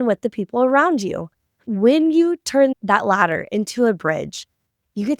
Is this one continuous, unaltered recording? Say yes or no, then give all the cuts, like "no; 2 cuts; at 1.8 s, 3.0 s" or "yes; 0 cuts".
no; 1 cut; at 1.7 s